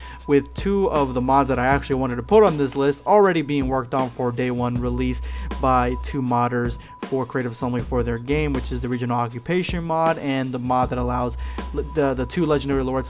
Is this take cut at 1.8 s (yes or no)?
yes